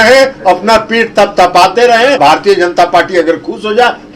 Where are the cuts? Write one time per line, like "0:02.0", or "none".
0:02.2